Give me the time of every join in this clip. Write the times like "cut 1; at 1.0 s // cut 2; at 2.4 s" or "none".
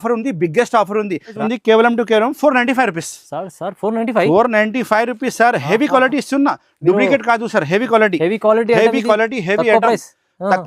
cut 1; at 1.4 s